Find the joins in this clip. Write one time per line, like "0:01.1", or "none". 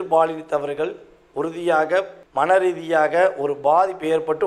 0:02.1